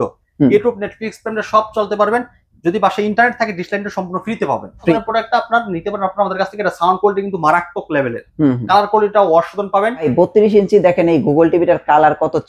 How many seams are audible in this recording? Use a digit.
2